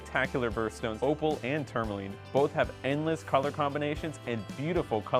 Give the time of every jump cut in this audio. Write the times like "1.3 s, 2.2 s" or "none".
0.9 s